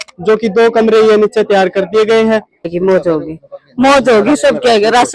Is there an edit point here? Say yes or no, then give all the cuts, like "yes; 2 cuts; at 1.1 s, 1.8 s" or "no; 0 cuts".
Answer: yes; 1 cut; at 2.7 s